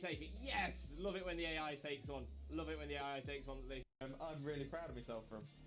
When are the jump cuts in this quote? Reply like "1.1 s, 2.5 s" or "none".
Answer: none